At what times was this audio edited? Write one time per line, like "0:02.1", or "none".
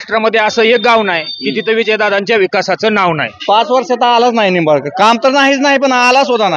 0:03.3